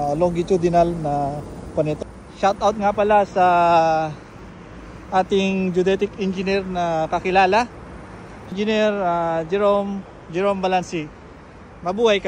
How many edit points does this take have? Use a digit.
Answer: 2